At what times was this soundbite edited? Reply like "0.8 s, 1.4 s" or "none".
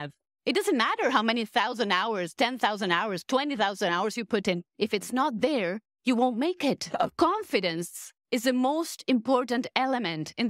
7.0 s